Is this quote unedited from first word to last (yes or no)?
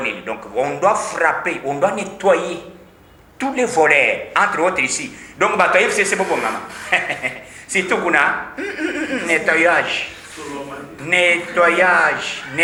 yes